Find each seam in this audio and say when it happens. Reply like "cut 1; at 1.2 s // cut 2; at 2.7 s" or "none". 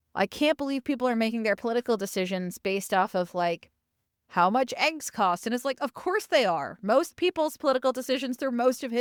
none

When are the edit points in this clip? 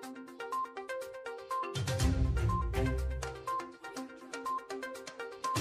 cut 1; at 1.1 s

